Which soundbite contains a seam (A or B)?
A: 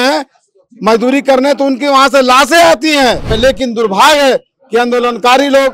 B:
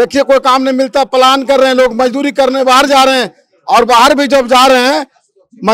A